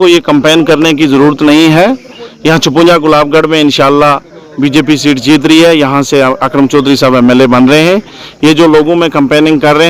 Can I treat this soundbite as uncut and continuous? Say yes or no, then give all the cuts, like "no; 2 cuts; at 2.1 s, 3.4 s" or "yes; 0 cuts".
yes; 0 cuts